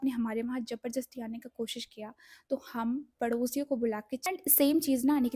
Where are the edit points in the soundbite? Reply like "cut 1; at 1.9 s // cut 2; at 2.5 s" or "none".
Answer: cut 1; at 4.2 s